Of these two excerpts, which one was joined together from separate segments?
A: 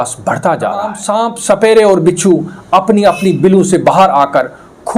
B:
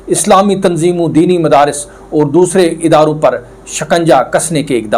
A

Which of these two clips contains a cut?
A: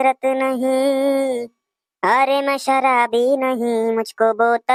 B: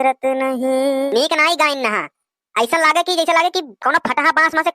B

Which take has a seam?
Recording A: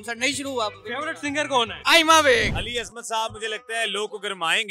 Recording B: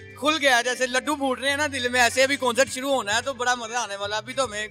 A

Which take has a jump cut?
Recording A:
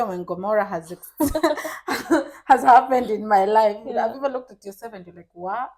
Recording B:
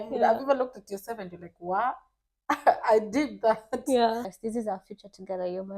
B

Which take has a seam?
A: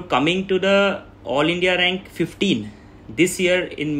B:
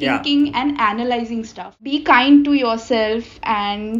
B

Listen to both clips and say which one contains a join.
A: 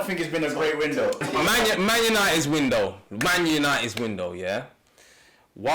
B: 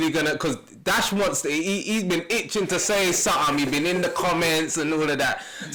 A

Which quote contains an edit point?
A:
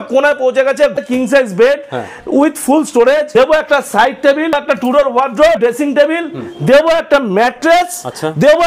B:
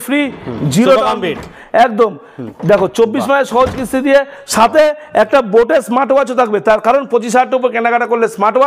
A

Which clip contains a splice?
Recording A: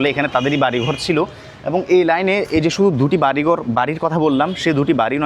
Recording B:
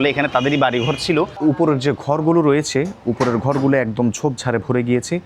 B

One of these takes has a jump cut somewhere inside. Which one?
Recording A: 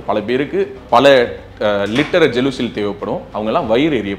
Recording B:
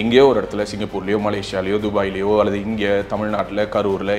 A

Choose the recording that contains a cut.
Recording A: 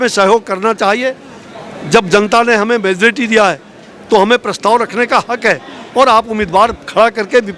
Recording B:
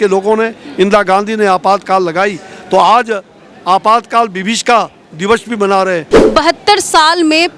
B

